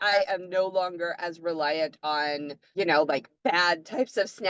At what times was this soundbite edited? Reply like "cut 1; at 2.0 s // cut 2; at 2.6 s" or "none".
cut 1; at 2.6 s // cut 2; at 3.3 s